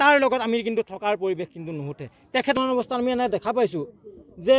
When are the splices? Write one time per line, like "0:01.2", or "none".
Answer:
0:02.6